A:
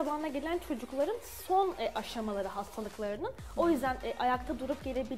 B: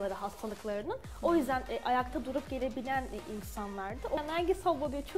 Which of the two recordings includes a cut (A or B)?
B